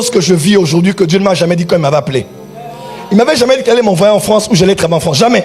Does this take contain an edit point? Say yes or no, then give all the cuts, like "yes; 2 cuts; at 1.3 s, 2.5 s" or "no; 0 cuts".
no; 0 cuts